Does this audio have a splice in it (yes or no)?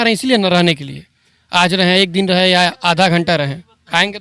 no